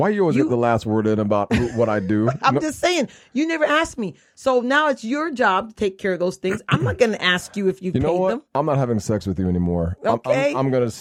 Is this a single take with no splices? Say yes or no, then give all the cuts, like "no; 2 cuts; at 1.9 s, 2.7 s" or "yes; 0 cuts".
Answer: yes; 0 cuts